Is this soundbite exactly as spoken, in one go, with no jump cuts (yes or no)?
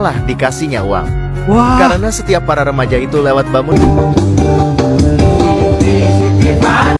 no